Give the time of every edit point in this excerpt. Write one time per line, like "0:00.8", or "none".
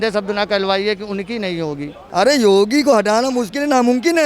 0:02.0